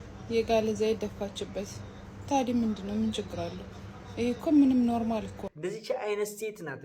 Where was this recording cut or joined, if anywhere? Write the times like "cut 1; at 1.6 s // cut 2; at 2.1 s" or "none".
cut 1; at 5.4 s